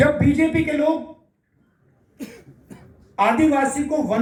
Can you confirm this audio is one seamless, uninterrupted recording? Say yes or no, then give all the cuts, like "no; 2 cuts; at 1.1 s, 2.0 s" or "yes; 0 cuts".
yes; 0 cuts